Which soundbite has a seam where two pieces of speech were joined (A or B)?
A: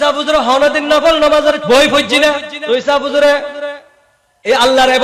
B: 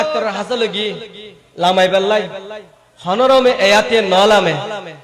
A